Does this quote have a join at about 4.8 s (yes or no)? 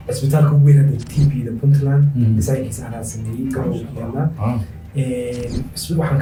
no